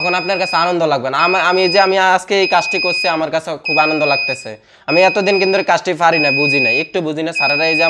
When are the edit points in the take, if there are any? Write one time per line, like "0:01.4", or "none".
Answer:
none